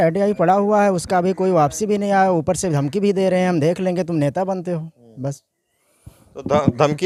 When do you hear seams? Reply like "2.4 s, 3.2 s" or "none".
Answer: none